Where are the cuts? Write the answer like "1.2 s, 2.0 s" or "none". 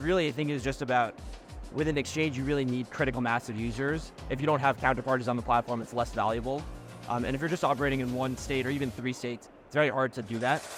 none